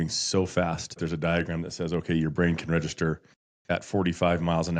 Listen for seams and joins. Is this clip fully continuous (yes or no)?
no